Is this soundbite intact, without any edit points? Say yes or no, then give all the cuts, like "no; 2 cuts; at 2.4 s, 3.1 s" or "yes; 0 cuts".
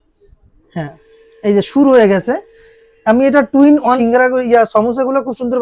no; 1 cut; at 4.0 s